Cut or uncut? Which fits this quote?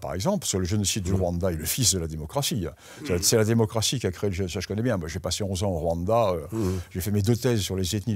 uncut